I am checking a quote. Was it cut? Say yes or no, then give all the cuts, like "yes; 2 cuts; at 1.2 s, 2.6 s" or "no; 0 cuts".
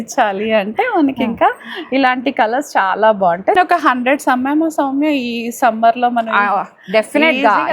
yes; 1 cut; at 3.6 s